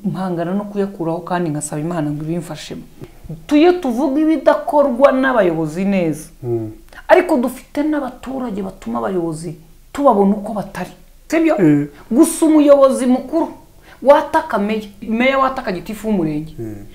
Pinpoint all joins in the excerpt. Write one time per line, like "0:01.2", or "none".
0:03.0
0:11.1
0:15.0